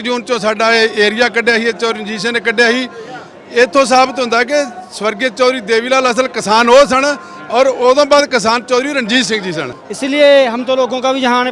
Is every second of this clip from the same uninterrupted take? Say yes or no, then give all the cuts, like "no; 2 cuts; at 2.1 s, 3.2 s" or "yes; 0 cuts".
yes; 0 cuts